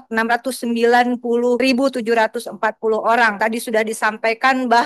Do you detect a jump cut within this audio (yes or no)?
yes